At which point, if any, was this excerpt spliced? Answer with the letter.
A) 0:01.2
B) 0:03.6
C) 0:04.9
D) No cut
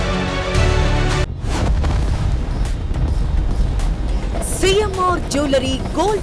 A